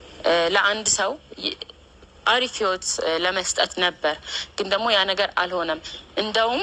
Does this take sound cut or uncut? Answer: uncut